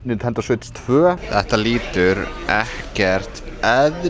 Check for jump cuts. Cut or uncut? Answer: cut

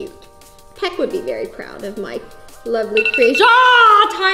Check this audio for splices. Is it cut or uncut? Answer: uncut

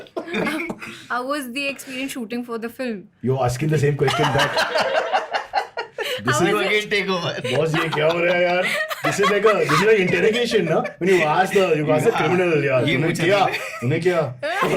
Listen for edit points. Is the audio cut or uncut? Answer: uncut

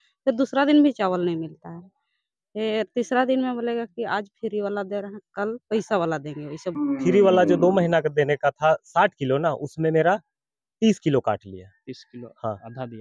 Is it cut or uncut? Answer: cut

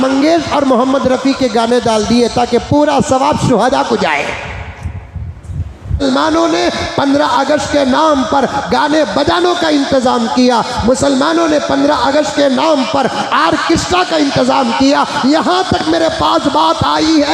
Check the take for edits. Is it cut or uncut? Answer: cut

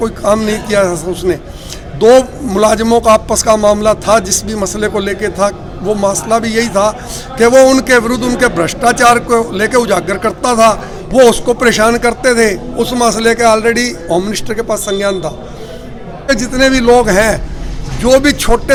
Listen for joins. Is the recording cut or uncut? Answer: uncut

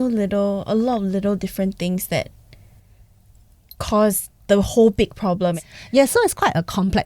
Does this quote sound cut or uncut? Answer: uncut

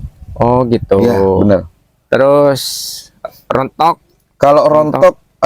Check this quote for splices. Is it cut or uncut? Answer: uncut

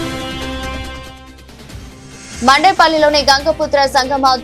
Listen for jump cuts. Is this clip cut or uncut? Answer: cut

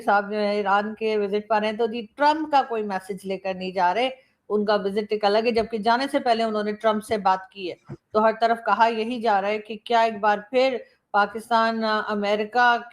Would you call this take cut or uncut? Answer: uncut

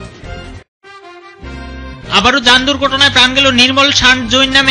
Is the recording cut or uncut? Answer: uncut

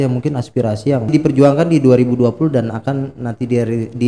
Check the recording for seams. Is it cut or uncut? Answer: cut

